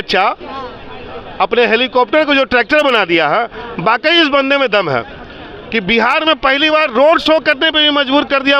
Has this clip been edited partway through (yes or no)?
no